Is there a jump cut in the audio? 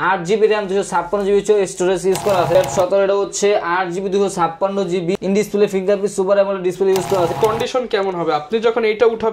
yes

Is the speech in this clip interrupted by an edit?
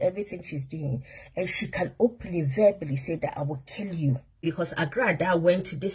yes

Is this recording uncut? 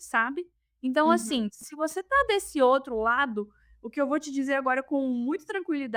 yes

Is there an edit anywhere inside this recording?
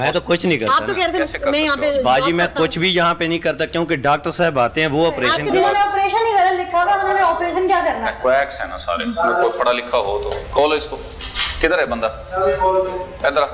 yes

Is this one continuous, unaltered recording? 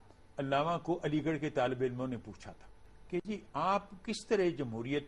yes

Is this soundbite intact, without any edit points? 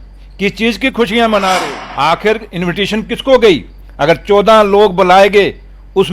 no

